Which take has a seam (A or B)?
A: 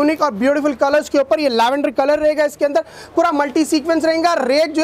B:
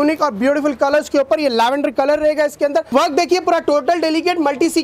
B